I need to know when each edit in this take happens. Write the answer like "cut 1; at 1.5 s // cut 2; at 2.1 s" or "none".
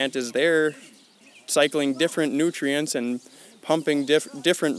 none

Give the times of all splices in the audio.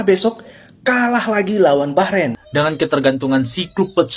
cut 1; at 2.5 s

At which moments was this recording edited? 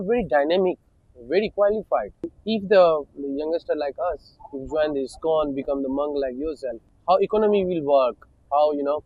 cut 1; at 2.3 s // cut 2; at 6.9 s

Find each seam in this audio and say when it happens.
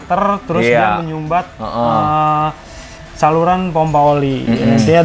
none

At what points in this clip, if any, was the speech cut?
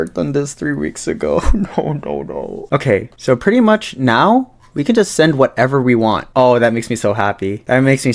none

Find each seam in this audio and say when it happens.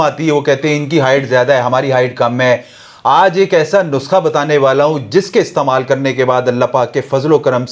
none

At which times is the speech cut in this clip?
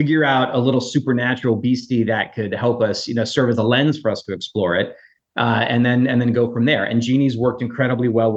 none

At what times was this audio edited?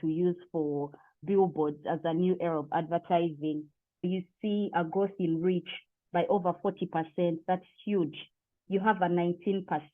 cut 1; at 4.0 s

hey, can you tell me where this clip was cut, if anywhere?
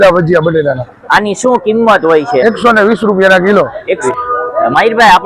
cut 1; at 4.0 s

